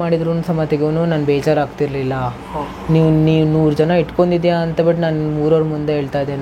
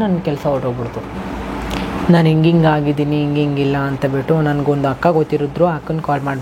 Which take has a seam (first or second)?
second